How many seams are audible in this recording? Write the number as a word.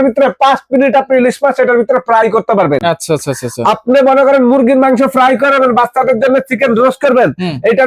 zero